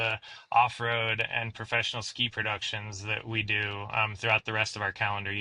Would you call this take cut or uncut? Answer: uncut